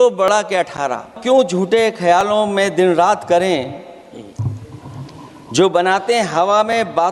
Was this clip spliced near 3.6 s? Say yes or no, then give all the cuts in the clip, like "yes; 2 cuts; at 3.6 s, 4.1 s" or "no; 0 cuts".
no; 1 cut; at 1.2 s